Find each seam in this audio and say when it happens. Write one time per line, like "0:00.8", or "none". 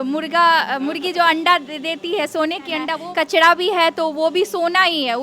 0:03.0